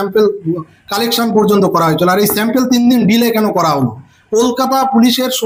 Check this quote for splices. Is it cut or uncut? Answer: uncut